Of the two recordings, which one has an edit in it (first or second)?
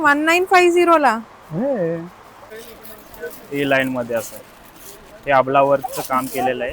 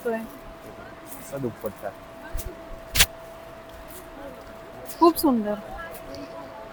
first